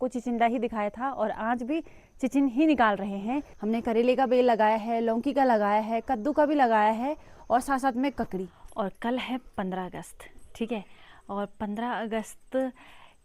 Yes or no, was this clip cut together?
yes